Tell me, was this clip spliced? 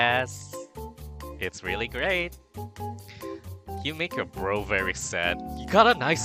no; 0 cuts

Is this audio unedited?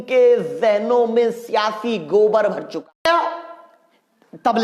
no; 1 cut; at 3.1 s

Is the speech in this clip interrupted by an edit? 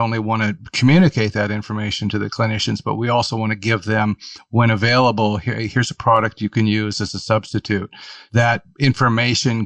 yes; 1 cut; at 8.3 s

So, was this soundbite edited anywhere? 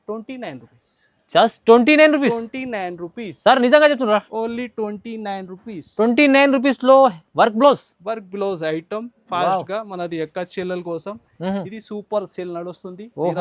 no; 0 cuts

